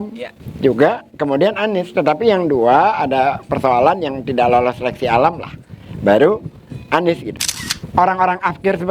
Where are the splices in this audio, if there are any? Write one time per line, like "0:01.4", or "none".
0:07.3